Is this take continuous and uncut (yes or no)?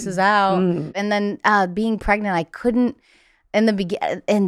no